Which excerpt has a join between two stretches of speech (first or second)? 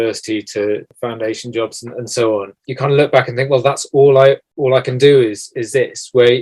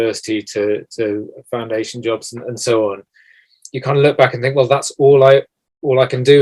first